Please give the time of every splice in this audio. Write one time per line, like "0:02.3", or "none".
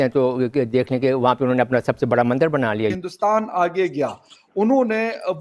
0:03.0